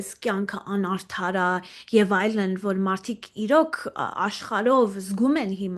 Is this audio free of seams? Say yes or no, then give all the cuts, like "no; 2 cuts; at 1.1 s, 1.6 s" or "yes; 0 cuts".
yes; 0 cuts